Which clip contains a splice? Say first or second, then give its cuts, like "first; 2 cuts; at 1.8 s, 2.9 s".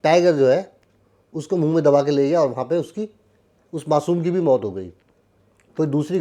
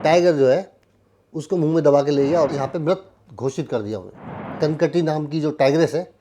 second; 2 cuts; at 2.5 s, 4.5 s